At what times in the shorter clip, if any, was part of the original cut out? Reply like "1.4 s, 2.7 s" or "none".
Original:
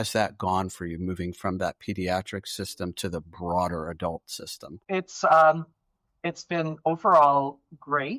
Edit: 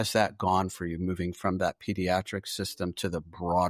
none